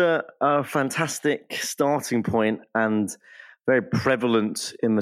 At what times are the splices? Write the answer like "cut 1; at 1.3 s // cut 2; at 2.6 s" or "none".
none